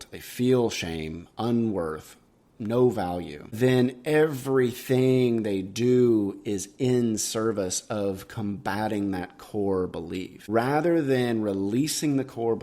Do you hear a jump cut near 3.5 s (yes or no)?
yes